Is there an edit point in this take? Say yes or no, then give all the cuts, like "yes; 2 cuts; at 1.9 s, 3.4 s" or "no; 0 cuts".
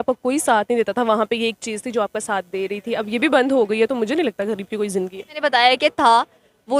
yes; 1 cut; at 5.3 s